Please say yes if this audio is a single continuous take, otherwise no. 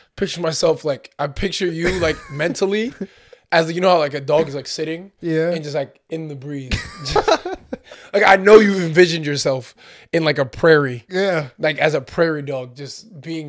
yes